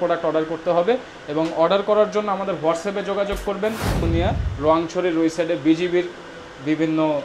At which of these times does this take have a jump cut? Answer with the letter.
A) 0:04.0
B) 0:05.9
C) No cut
A